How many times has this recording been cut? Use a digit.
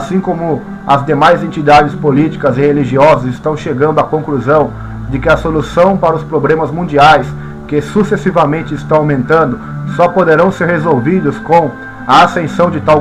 1